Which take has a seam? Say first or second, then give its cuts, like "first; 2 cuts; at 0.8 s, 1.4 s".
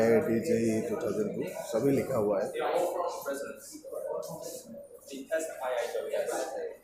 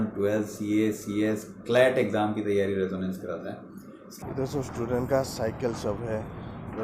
second; 1 cut; at 4.1 s